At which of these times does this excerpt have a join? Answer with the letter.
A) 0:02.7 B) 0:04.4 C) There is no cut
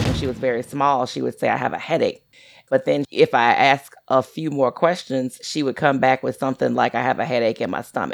A